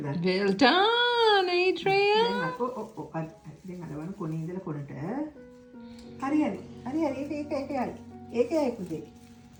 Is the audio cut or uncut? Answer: uncut